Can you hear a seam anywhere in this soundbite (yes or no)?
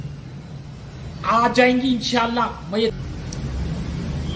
yes